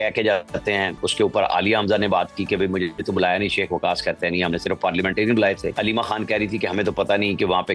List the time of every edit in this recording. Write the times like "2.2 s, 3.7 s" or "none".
1.0 s, 3.0 s, 5.7 s